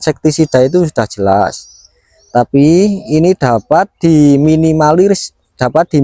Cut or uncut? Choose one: uncut